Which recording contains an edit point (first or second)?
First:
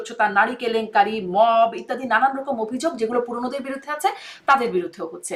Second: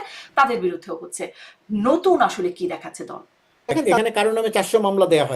second